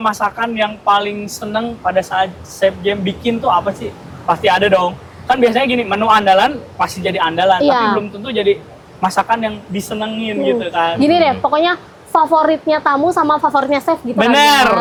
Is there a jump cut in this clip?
no; 0 cuts

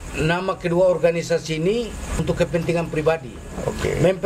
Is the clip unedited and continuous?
no; 1 cut; at 2.1 s

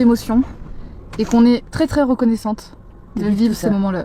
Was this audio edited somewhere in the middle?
no; 0 cuts

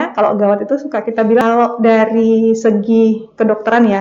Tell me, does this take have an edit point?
yes; 1 cut; at 1.4 s

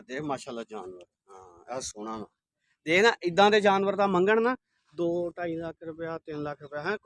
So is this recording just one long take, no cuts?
yes; 0 cuts

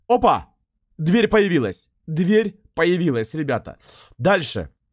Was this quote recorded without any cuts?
yes; 0 cuts

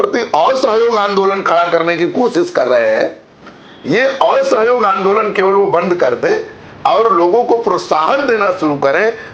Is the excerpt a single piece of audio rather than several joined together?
yes; 0 cuts

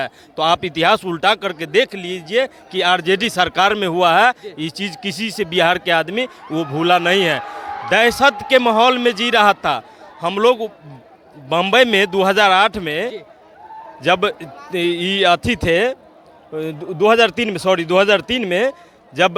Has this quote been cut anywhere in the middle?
no; 0 cuts

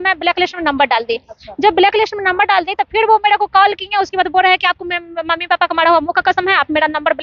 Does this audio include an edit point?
no; 0 cuts

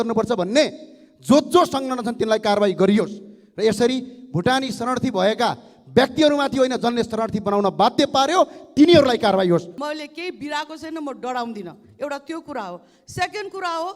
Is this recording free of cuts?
no; 1 cut; at 9.7 s

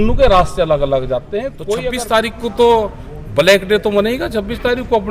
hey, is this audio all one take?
no; 1 cut; at 1.6 s

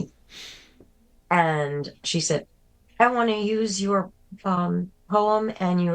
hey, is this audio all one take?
no; 1 cut; at 2.0 s

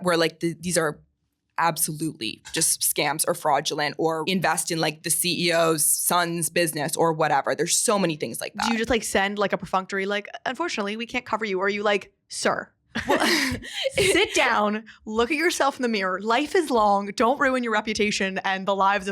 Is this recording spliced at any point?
yes; 2 cuts; at 4.2 s, 8.5 s

